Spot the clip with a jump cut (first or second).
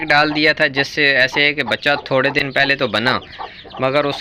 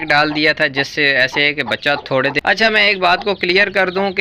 second